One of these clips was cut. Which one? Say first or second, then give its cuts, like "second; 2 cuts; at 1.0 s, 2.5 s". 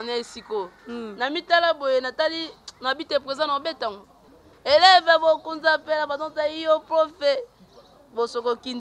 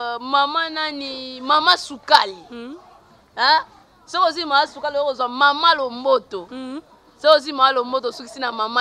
first; 1 cut; at 4.2 s